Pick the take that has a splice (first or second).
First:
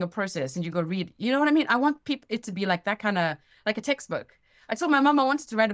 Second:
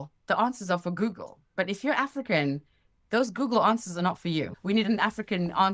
second